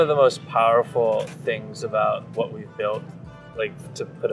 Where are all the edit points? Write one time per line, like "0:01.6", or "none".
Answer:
none